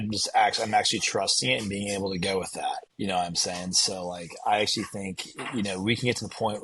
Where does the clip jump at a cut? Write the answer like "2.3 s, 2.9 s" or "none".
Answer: 2.9 s